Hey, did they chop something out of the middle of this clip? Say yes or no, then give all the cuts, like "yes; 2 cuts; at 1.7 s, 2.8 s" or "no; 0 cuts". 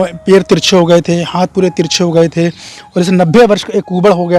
no; 0 cuts